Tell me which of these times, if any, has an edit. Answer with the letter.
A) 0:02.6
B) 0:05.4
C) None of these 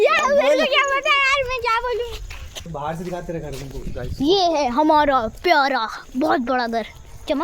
A